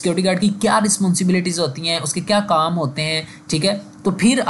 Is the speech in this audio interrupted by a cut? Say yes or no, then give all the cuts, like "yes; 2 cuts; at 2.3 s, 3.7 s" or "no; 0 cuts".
no; 0 cuts